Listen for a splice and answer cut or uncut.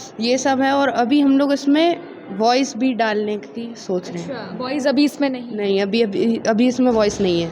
uncut